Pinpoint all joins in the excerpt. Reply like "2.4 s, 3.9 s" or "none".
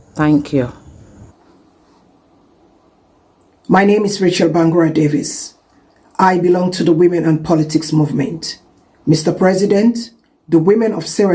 1.3 s